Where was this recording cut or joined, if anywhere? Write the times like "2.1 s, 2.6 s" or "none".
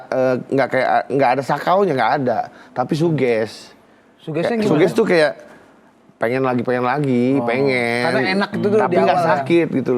none